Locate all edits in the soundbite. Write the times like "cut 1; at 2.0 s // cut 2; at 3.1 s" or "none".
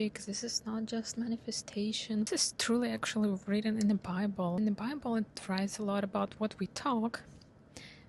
none